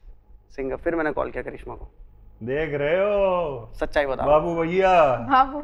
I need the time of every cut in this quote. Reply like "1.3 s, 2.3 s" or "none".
none